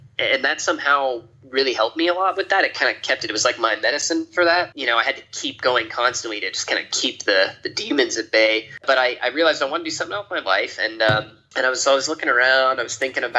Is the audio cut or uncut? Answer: cut